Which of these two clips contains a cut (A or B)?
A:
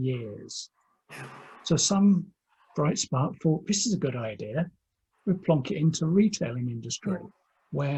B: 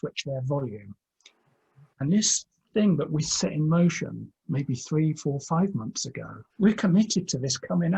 B